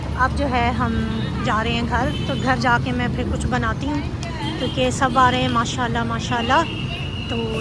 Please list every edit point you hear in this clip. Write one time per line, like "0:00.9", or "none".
none